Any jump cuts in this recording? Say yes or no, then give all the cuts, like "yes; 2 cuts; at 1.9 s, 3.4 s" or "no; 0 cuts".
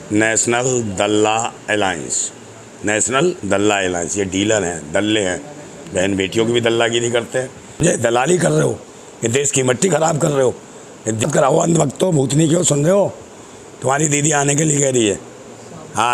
yes; 2 cuts; at 7.8 s, 11.2 s